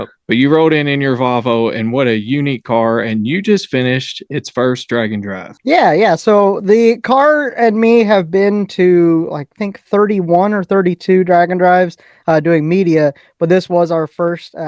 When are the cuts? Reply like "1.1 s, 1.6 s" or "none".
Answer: 5.4 s